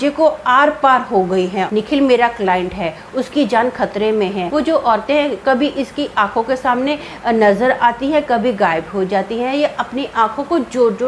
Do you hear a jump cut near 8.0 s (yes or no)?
no